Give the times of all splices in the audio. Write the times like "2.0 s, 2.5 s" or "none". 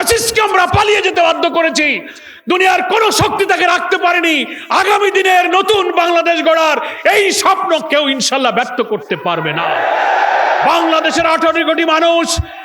none